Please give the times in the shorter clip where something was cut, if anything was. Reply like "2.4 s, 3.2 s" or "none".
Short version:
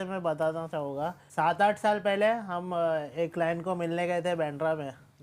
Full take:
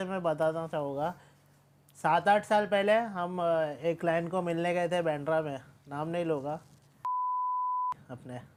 1.2 s